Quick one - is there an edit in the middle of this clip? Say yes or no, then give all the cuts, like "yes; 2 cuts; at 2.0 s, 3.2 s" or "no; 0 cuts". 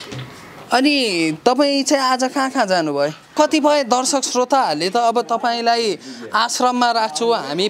yes; 1 cut; at 3.3 s